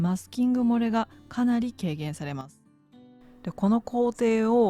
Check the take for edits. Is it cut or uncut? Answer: cut